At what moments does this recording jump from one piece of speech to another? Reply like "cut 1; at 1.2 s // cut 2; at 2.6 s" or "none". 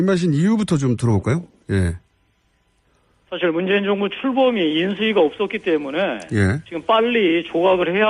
cut 1; at 3.4 s

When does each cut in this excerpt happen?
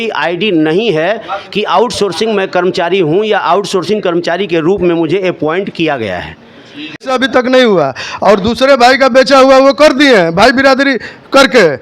cut 1; at 7.0 s

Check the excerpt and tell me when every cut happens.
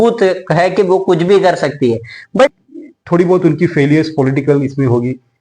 cut 1; at 2.5 s

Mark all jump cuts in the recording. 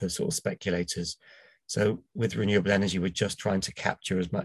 none

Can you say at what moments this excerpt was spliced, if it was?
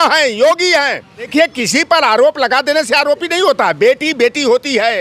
cut 1; at 1.3 s

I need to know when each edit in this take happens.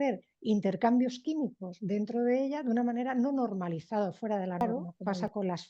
cut 1; at 4.6 s

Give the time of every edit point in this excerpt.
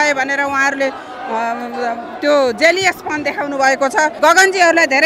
cut 1; at 4.2 s

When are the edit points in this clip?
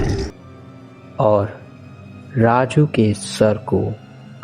none

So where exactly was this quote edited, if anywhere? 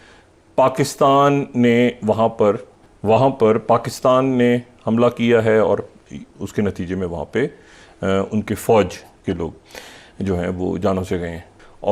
none

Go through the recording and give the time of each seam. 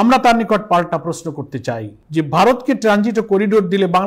cut 1; at 1.9 s

